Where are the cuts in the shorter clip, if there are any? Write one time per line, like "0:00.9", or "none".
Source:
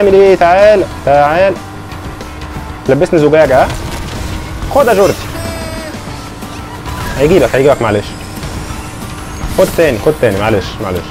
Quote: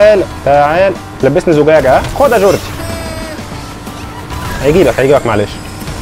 0:01.1
0:02.1